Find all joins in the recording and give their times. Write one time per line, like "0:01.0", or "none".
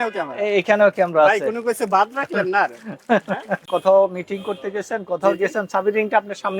0:03.6